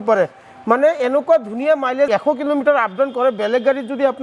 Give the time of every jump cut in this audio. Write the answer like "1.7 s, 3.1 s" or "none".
2.1 s